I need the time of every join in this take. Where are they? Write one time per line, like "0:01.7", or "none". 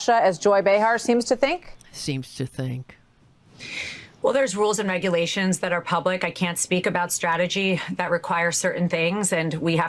none